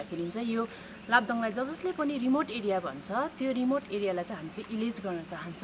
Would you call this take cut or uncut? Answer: uncut